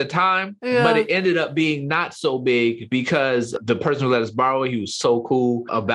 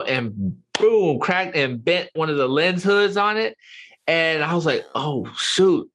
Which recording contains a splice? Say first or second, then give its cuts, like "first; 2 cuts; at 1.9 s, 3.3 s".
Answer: second; 1 cut; at 2.1 s